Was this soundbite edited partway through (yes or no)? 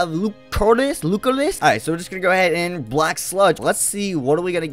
yes